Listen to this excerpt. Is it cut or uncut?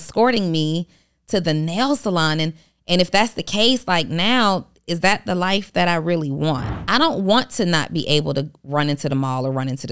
cut